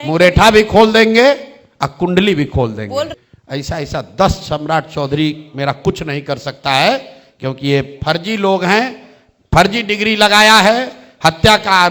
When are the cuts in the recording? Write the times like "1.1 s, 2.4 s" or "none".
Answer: 3.1 s